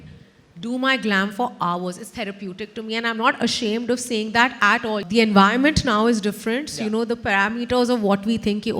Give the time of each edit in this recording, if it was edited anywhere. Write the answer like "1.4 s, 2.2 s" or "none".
5.0 s